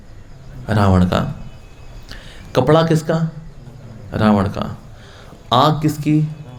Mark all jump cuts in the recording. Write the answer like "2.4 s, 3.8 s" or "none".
none